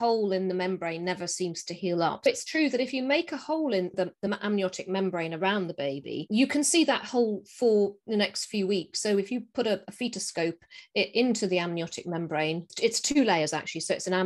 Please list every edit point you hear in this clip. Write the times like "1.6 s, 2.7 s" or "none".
2.3 s, 3.9 s